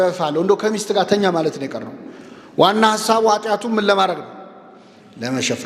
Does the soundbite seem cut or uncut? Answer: uncut